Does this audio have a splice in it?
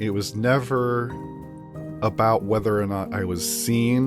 no; 0 cuts

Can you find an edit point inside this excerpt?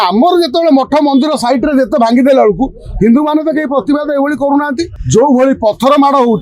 yes; 1 cut; at 4.9 s

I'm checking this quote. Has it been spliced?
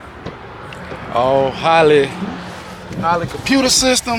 no; 0 cuts

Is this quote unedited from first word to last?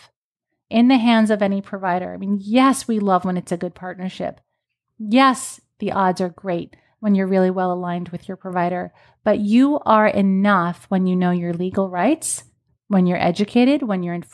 yes; 0 cuts

